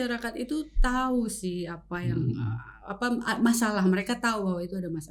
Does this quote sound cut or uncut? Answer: uncut